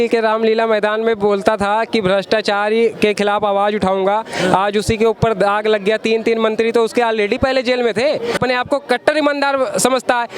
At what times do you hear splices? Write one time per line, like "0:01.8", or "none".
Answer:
0:08.4